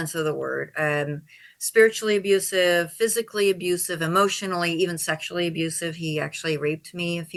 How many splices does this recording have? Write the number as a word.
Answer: zero